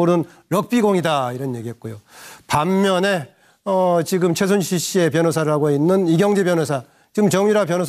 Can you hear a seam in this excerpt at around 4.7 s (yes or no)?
yes